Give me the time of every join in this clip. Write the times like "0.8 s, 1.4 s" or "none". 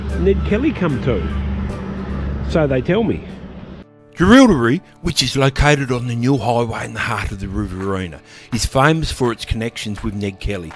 none